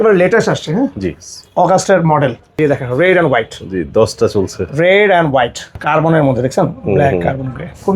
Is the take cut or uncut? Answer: cut